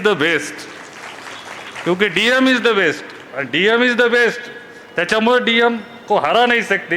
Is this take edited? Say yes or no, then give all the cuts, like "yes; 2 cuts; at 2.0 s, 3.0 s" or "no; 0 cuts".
no; 0 cuts